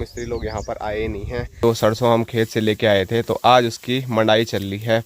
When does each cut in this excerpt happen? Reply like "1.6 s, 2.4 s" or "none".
1.6 s